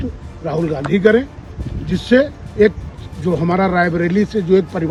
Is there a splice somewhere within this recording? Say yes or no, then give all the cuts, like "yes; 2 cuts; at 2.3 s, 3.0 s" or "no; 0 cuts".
no; 0 cuts